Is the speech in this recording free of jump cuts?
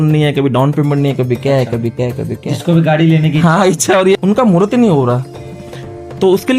no; 1 cut; at 4.2 s

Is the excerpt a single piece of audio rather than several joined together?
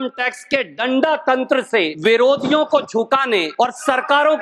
no; 2 cuts; at 1.9 s, 3.5 s

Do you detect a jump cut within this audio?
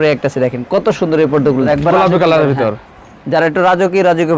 yes; 1 cut; at 1.7 s

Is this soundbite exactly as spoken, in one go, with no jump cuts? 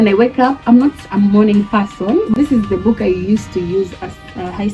no; 1 cut; at 2.3 s

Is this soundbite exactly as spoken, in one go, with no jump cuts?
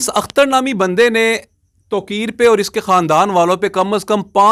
yes; 0 cuts

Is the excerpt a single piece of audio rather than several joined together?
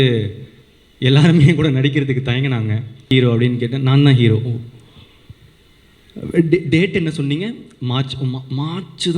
no; 1 cut; at 3.1 s

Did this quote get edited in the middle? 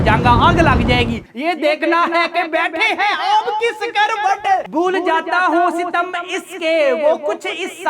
yes; 2 cuts; at 1.3 s, 4.6 s

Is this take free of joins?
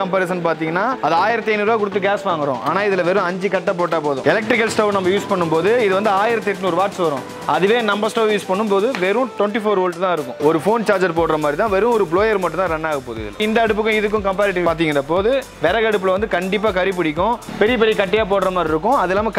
no; 3 cuts; at 1.0 s, 13.4 s, 14.6 s

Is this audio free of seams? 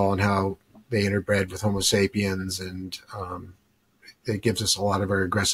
yes; 0 cuts

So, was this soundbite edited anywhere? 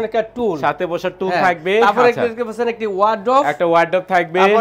no; 0 cuts

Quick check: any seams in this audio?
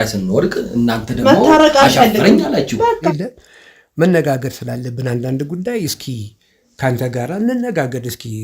yes; 1 cut; at 2.9 s

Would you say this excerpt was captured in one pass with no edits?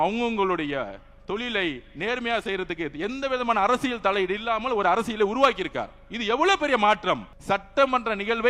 no; 1 cut; at 7.3 s

